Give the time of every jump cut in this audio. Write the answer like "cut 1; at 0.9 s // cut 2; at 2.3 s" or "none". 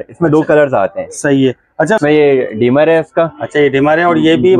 cut 1; at 2.0 s